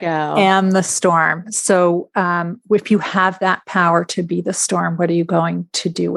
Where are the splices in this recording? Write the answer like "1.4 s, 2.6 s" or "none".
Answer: none